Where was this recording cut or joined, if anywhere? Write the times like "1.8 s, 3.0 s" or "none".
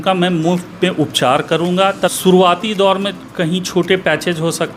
2.1 s